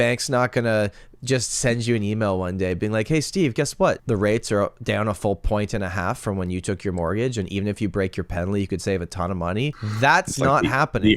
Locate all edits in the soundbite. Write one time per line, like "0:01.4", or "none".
0:04.0
0:09.8

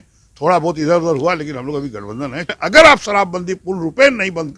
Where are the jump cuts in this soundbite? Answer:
0:02.6

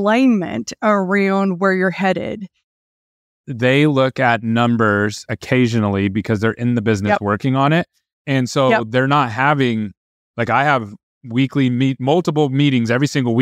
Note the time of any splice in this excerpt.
0:02.8

